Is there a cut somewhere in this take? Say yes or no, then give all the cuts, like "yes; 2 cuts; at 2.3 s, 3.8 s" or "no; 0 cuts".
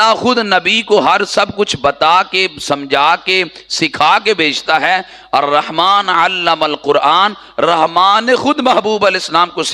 no; 0 cuts